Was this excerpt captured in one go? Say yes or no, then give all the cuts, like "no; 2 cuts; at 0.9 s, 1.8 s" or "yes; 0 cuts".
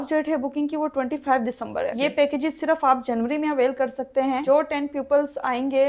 yes; 0 cuts